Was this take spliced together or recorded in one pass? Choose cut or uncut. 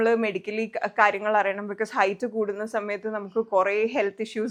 uncut